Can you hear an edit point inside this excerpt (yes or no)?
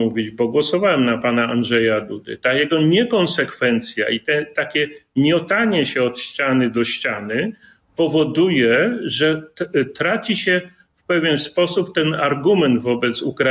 no